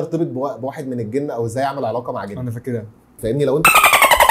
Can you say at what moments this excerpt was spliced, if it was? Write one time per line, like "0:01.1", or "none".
0:03.2